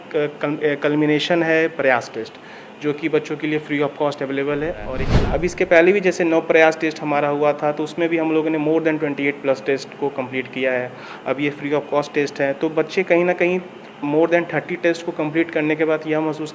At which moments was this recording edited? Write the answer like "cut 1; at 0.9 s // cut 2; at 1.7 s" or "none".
cut 1; at 5.0 s